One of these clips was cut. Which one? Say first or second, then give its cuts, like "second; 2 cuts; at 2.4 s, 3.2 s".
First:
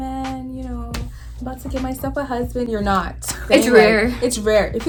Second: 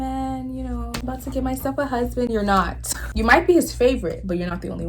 second; 2 cuts; at 1.0 s, 3.0 s